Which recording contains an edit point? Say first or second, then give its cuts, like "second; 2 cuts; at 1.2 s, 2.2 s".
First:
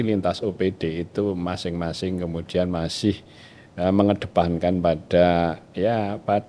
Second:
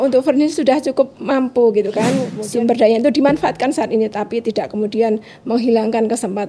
second; 1 cut; at 2.4 s